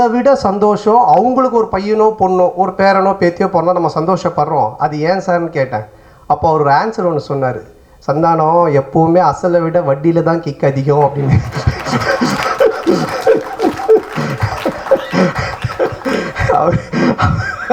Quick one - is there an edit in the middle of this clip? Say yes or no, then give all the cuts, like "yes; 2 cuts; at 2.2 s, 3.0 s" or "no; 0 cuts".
no; 0 cuts